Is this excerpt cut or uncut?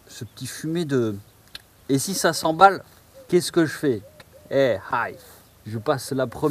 uncut